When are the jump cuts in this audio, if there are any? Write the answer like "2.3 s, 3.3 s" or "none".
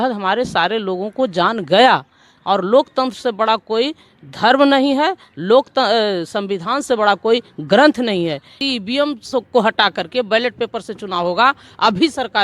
2.3 s, 8.6 s